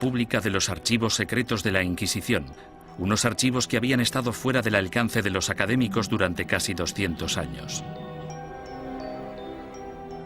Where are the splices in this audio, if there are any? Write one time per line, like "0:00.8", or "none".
0:08.8